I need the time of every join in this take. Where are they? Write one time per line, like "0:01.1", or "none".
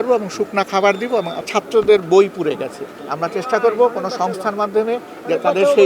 0:01.4